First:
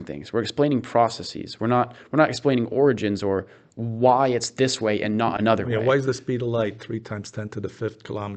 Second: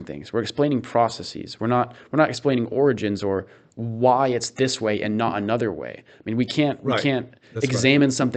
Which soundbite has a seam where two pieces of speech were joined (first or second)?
first